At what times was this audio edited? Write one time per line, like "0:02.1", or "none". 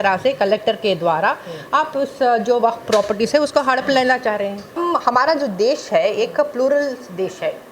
0:04.8

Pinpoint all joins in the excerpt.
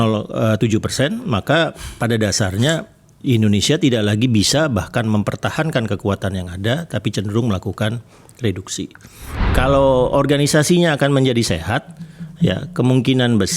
0:09.4

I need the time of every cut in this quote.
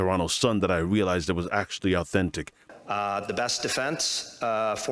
0:02.6

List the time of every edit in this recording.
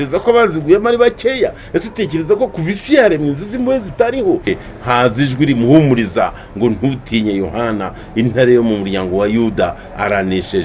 0:04.5

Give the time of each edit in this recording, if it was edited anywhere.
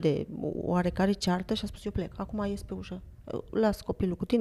none

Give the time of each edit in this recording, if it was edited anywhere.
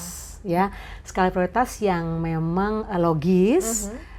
none

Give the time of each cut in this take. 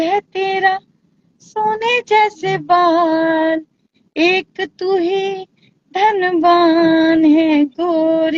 none

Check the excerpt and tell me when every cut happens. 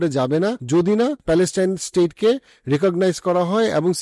0:00.9

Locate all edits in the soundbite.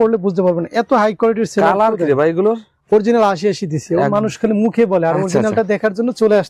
none

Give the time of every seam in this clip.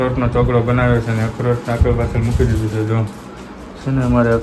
none

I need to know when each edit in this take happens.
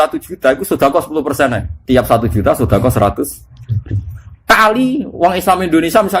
0:01.7

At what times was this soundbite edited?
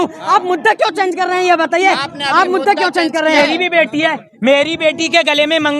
0:03.4

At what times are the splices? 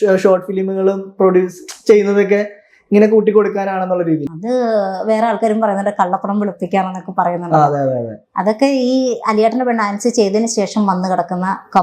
0:04.3

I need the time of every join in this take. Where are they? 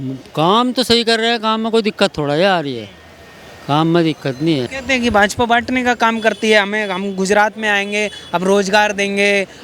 0:04.7

